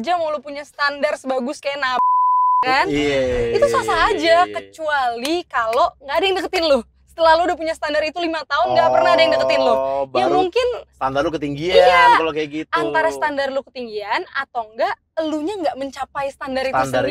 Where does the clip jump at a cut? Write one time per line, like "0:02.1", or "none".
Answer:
none